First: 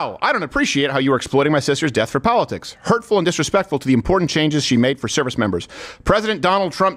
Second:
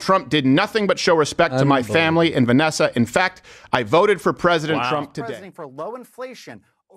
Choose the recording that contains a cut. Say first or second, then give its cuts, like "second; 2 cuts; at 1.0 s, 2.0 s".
second; 1 cut; at 5.1 s